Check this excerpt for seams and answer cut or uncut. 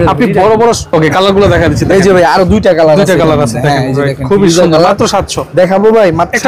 uncut